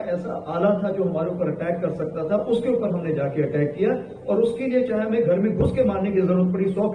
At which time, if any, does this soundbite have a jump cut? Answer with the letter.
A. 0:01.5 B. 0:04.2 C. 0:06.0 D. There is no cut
D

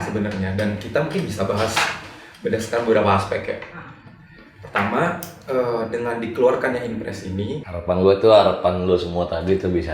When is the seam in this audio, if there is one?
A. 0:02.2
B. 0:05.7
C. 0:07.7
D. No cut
C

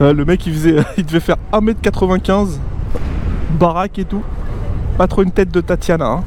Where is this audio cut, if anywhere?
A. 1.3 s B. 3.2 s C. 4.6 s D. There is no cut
D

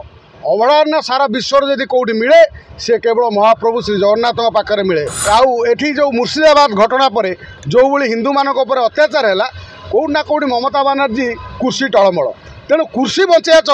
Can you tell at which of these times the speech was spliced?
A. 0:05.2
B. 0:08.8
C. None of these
A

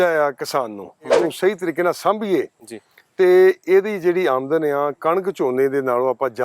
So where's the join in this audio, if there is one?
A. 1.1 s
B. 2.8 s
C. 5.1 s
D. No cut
A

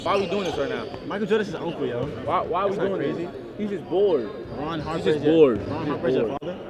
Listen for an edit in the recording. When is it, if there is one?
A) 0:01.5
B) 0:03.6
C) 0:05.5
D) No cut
D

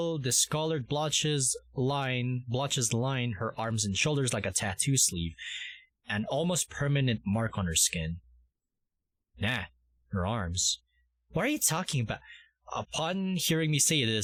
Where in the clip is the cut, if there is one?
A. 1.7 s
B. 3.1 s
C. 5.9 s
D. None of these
D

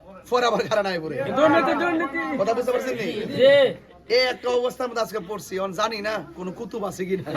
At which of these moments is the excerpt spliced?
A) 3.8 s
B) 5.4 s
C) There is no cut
C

